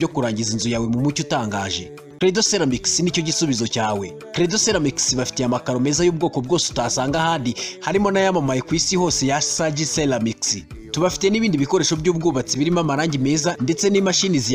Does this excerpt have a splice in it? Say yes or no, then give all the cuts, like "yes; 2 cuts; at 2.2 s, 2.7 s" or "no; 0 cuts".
no; 0 cuts